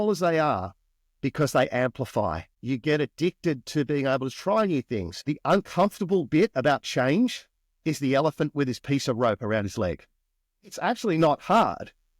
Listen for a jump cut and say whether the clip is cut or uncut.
cut